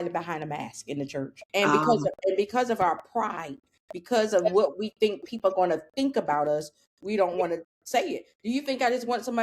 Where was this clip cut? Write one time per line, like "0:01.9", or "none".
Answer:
0:01.4